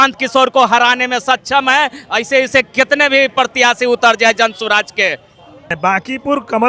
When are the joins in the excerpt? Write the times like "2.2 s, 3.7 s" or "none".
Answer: 5.7 s